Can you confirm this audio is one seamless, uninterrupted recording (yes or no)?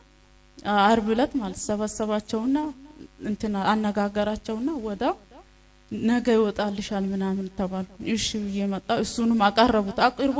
yes